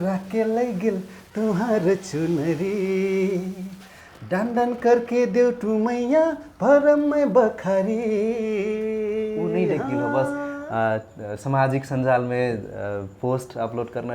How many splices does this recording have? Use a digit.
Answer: 1